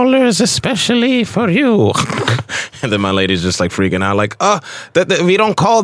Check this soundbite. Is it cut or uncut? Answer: uncut